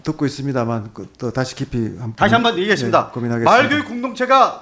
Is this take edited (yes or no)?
no